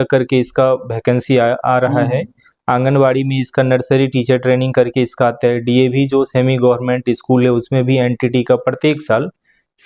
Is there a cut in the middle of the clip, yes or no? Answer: no